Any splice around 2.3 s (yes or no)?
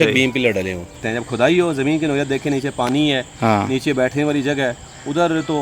no